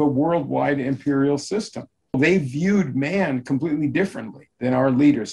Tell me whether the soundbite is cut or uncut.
cut